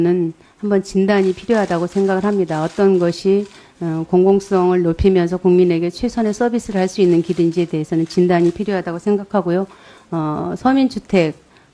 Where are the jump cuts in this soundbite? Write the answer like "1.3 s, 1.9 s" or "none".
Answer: 5.8 s